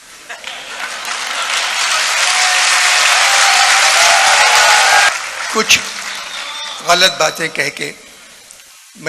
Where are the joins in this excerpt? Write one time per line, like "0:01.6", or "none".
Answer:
0:05.1